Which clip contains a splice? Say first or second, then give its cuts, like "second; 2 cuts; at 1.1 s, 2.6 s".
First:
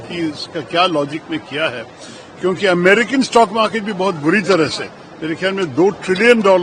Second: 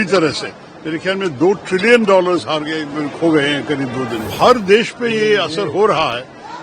second; 1 cut; at 4.3 s